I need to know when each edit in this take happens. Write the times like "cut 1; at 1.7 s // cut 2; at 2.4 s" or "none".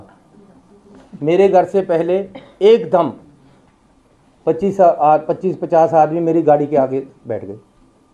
none